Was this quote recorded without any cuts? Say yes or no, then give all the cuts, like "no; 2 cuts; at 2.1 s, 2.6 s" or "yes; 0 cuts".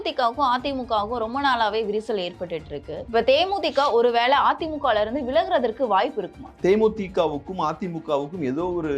no; 2 cuts; at 2.9 s, 6.5 s